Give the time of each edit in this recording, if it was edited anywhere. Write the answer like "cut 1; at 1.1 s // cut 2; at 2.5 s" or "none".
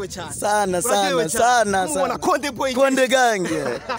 none